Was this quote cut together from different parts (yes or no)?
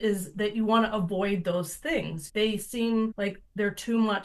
yes